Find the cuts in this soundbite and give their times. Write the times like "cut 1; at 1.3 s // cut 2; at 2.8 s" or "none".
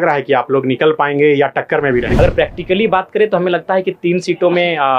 cut 1; at 2.1 s